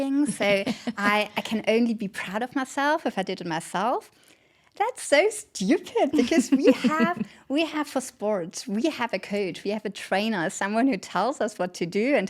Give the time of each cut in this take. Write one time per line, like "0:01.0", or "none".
none